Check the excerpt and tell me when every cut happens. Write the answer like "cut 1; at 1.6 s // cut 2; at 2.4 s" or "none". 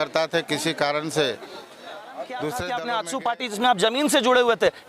cut 1; at 2.4 s